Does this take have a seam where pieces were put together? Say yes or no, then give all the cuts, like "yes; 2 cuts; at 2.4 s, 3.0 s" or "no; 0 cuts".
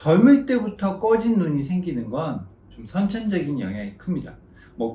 no; 0 cuts